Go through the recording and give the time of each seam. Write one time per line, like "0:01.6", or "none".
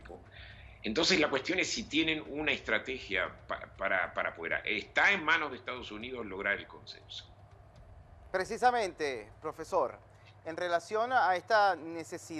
0:07.2

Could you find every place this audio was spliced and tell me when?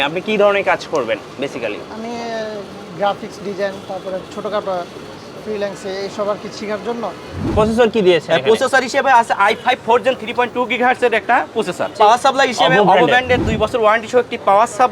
0:07.5
0:12.0

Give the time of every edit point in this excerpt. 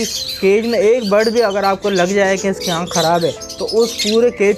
none

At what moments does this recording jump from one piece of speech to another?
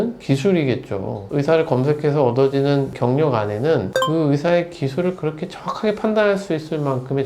0:01.2

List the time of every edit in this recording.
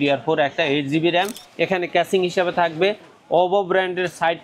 0:01.4

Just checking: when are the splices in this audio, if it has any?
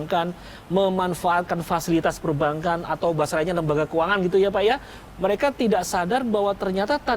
0:05.0

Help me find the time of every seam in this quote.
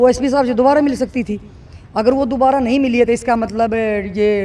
none

